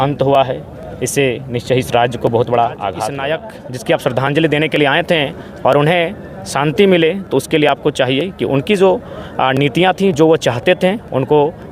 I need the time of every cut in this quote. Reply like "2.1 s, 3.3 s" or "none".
3.1 s

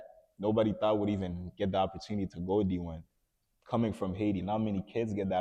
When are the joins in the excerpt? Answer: none

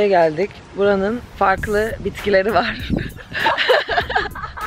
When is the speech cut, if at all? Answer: 1.2 s

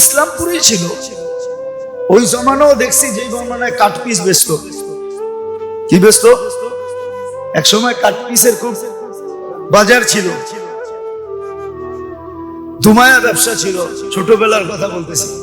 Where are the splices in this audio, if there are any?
0.9 s, 2.1 s

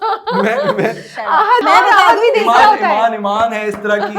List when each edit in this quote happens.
1.6 s

